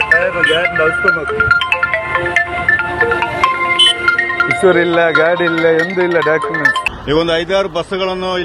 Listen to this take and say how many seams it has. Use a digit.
1